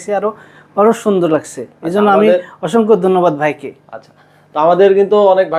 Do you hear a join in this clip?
no; 0 cuts

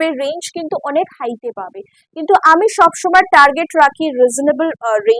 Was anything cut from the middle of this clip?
no; 0 cuts

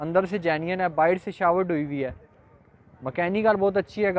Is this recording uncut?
yes; 0 cuts

